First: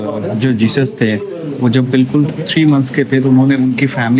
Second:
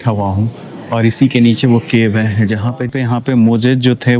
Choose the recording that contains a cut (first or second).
second